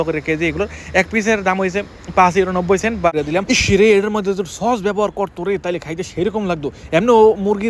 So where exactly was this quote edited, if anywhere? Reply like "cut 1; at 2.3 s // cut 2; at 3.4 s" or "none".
cut 1; at 3.1 s